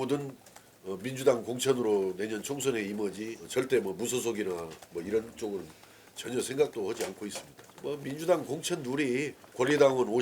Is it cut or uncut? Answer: cut